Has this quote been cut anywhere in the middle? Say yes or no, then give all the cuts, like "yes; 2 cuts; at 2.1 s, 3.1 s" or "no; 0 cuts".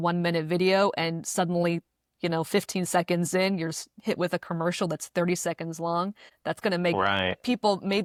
no; 0 cuts